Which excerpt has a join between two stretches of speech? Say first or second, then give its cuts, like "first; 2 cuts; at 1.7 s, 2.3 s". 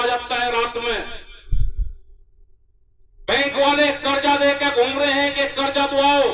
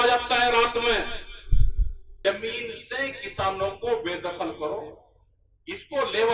second; 1 cut; at 2.2 s